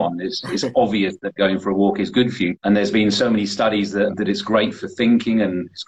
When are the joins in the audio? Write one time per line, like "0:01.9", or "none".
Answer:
0:02.5